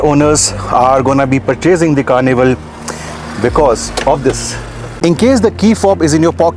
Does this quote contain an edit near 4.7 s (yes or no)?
yes